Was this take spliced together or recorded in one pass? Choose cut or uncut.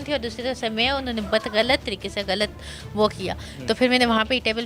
uncut